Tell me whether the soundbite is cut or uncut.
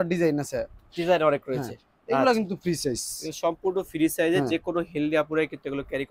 uncut